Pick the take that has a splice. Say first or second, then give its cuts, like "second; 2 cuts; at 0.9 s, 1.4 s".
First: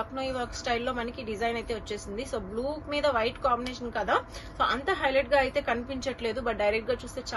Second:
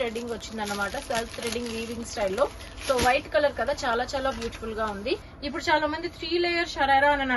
second; 1 cut; at 5.3 s